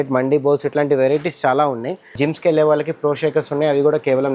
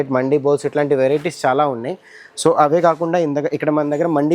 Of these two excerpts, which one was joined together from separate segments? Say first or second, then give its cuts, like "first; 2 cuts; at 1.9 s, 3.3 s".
first; 1 cut; at 2.2 s